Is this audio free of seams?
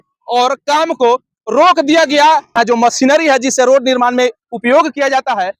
no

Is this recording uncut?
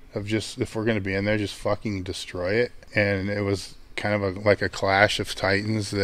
no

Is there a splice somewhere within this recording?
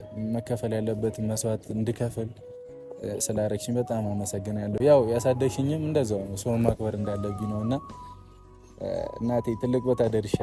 no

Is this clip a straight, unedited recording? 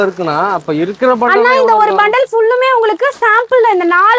yes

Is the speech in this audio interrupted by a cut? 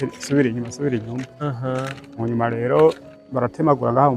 no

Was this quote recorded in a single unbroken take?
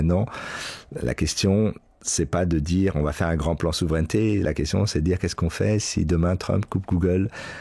yes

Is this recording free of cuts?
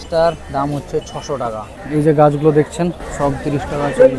no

